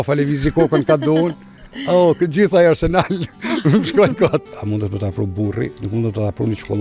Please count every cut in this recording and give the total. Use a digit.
2